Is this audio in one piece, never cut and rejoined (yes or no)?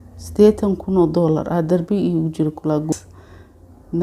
no